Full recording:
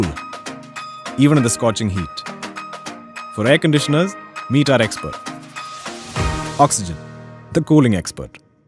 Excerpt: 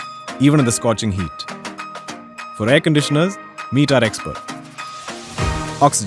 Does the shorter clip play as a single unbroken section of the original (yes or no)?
yes